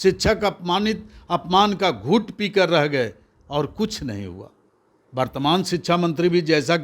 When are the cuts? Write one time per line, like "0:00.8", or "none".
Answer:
none